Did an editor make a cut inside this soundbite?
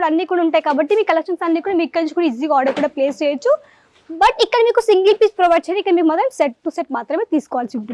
no; 0 cuts

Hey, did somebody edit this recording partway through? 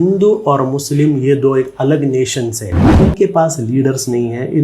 yes; 1 cut; at 2.9 s

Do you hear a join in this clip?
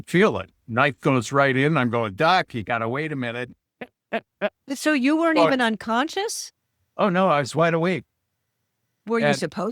no; 0 cuts

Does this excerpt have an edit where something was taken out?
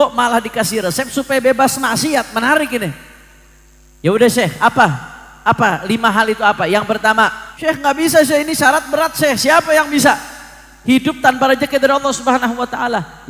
yes; 1 cut; at 7.5 s

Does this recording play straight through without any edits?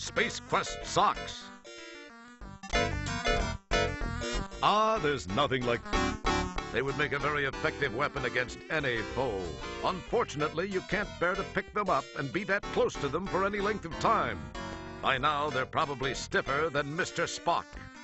yes; 0 cuts

